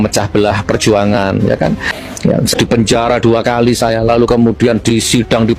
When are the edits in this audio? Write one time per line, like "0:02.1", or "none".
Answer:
0:01.9